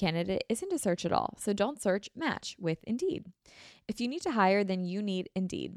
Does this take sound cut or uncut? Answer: uncut